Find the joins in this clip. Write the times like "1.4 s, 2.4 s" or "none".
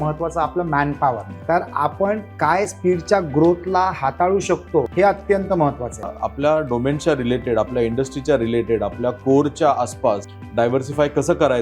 1.3 s, 2.7 s, 4.9 s, 6.2 s, 10.4 s